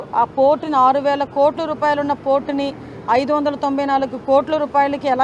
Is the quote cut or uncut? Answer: uncut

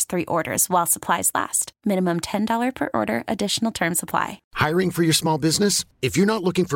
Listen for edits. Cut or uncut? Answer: cut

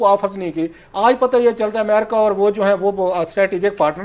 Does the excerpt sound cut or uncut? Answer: uncut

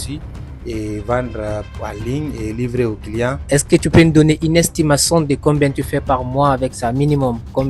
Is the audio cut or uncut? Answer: cut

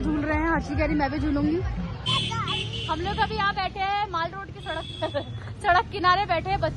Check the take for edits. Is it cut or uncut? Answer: cut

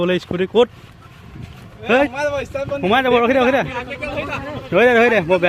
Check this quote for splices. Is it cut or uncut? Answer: uncut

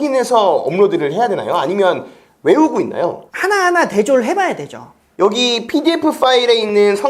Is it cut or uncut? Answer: cut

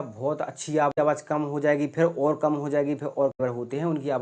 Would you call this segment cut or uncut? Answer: cut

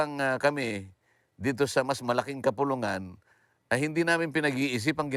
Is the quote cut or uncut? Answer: uncut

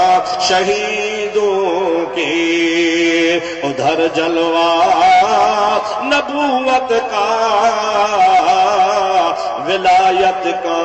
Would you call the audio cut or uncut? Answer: uncut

